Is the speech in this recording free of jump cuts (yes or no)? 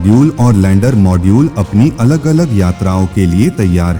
yes